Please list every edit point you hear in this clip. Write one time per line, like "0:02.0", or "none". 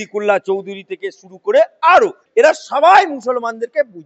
0:02.2